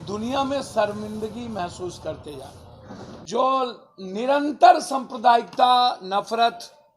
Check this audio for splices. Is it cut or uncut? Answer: cut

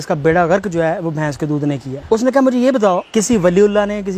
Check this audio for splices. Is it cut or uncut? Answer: cut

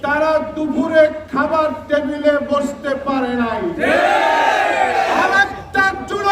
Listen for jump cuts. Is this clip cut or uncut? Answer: cut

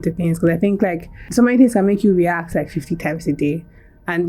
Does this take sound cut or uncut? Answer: cut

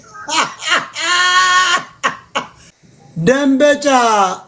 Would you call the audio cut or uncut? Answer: cut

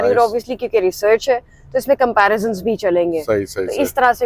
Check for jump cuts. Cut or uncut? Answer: uncut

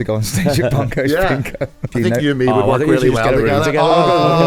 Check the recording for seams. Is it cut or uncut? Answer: cut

